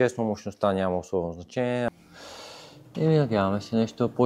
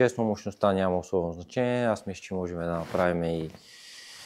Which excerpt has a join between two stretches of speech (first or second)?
first